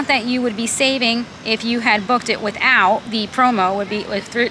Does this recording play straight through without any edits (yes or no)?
no